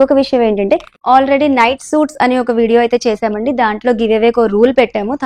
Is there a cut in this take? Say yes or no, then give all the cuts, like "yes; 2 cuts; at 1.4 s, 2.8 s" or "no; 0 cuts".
yes; 1 cut; at 1.0 s